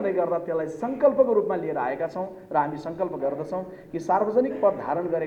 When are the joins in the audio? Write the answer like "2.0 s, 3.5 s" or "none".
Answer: none